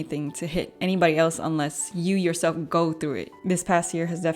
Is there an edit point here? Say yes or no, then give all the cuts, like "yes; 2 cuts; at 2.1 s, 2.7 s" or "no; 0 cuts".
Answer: yes; 1 cut; at 3.3 s